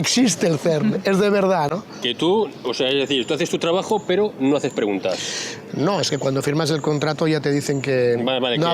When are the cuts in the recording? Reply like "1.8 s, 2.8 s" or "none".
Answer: 1.7 s